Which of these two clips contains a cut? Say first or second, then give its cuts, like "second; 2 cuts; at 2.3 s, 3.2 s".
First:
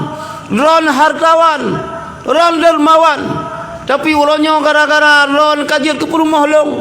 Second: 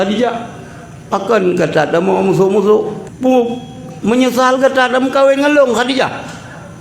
second; 1 cut; at 3.0 s